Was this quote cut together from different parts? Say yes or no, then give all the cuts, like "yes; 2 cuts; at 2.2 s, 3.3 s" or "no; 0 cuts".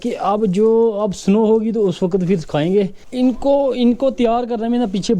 yes; 1 cut; at 3.1 s